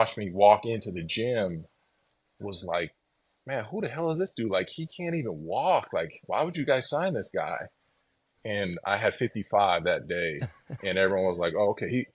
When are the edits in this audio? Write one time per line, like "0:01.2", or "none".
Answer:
none